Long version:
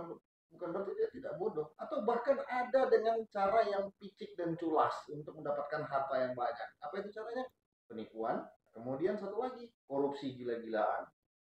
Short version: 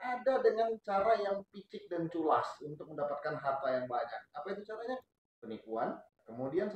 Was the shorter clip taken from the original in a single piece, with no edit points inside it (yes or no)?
yes